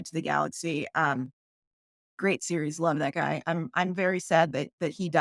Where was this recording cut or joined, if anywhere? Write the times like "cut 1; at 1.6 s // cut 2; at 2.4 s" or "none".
none